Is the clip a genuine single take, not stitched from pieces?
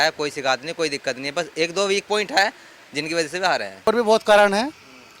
no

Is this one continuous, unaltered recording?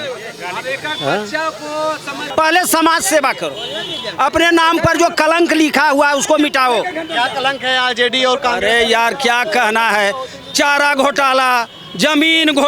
no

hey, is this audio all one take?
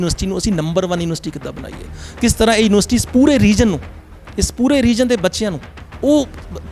yes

